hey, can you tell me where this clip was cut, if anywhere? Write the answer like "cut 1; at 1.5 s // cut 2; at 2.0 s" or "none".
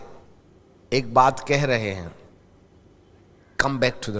none